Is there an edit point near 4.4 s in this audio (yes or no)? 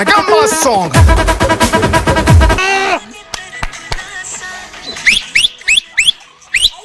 no